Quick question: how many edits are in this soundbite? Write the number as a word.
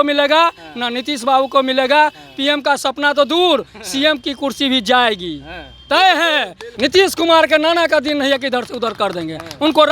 one